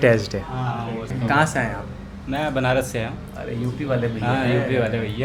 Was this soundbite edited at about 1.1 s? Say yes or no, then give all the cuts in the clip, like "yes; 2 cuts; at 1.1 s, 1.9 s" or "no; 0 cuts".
yes; 1 cut; at 1.1 s